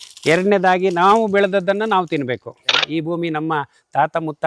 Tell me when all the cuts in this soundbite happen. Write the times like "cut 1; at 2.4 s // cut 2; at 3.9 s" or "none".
cut 1; at 2.8 s

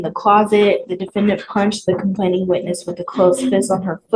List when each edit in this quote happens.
none

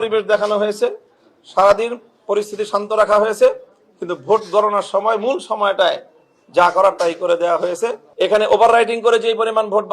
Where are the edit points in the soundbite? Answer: cut 1; at 8.0 s

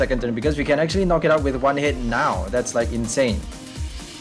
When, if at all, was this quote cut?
none

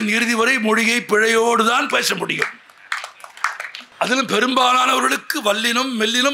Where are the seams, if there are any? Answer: cut 1; at 3.7 s

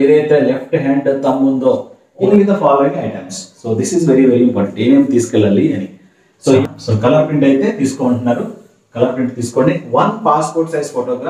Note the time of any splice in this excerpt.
cut 1; at 2.3 s // cut 2; at 6.6 s

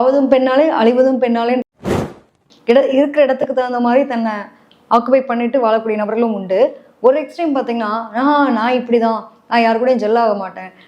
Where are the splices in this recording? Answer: cut 1; at 2.1 s

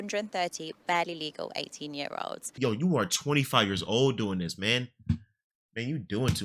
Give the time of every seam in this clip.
cut 1; at 2.5 s

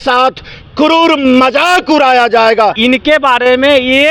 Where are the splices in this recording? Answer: cut 1; at 2.8 s

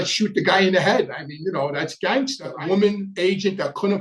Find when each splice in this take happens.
cut 1; at 2.5 s

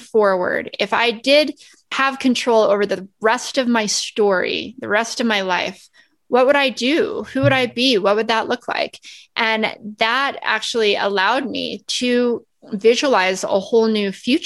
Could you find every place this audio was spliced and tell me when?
cut 1; at 2.0 s

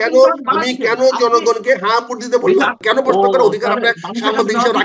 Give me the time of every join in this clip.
cut 1; at 2.8 s

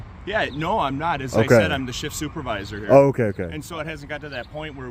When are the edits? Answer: none

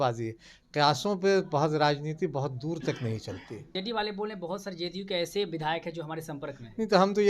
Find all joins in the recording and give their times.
cut 1; at 3.8 s

